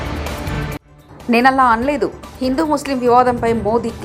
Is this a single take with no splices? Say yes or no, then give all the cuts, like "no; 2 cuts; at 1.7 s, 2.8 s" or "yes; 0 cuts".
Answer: yes; 0 cuts